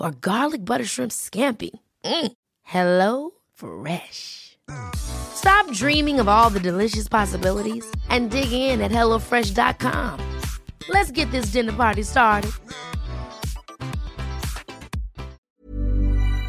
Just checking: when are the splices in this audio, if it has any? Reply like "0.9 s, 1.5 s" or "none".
15.5 s